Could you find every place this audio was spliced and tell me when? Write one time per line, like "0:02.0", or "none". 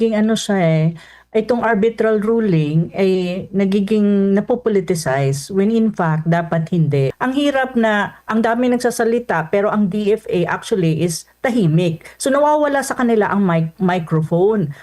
0:07.1